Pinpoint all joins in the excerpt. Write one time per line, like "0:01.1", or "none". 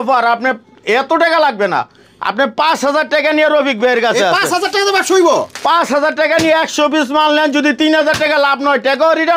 none

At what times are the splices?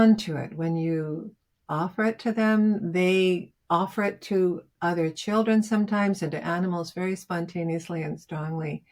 none

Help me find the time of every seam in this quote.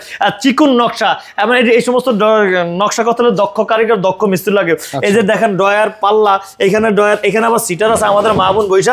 none

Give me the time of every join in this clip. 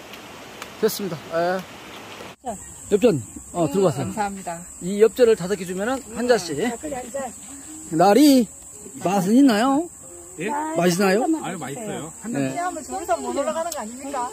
0:02.5
0:12.5

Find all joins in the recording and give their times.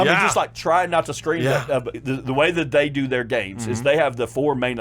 0:02.0

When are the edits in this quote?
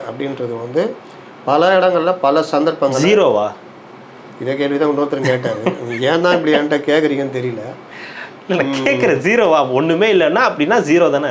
none

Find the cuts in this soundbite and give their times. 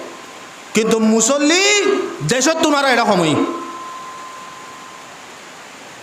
none

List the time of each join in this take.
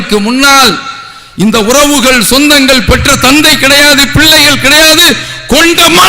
none

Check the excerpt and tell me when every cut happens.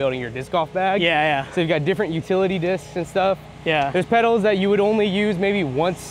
none

